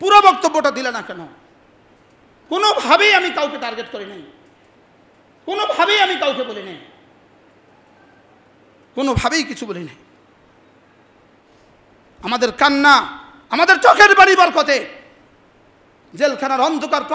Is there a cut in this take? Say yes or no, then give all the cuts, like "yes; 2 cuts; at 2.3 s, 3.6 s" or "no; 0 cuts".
yes; 1 cut; at 11.5 s